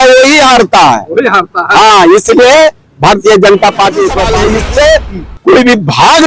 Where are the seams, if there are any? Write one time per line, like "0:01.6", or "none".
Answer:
0:04.3